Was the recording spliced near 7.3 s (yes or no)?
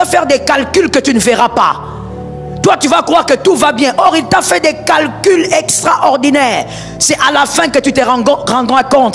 no